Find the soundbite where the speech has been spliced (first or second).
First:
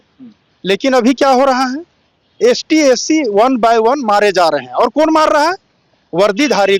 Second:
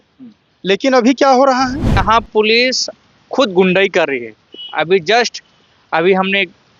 second